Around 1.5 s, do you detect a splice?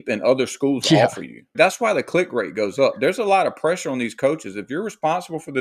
yes; 1 cut; at 1.5 s

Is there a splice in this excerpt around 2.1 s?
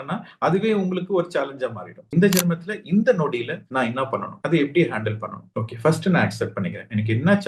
yes; 1 cut; at 2.1 s

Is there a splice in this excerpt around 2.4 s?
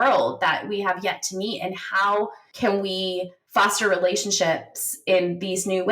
yes; 2 cuts; at 2.4 s, 3.4 s

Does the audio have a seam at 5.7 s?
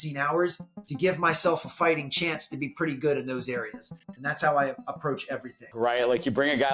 yes; 1 cut; at 5.7 s

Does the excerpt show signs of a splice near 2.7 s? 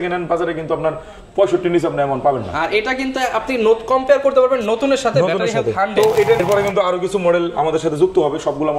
no; 1 cut; at 6.4 s

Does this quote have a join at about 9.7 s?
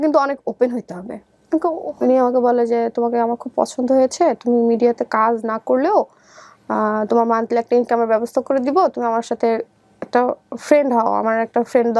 no; 1 cut; at 1.4 s

